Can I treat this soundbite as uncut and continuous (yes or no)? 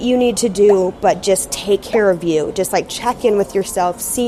yes